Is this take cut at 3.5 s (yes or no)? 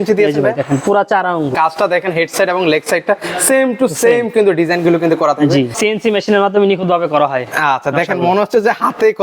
no